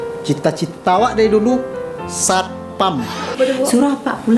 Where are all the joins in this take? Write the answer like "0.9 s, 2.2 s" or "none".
3.3 s